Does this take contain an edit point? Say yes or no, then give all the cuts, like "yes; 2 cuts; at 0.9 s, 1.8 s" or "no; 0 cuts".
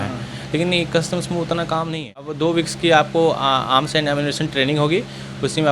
yes; 1 cut; at 2.3 s